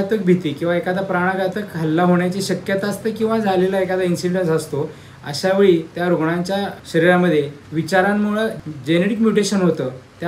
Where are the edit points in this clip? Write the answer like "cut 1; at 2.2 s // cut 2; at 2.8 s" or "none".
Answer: cut 1; at 6.8 s // cut 2; at 8.6 s